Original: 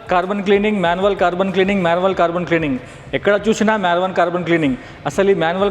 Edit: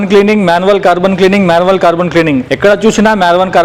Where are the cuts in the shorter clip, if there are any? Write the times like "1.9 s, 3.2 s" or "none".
2.5 s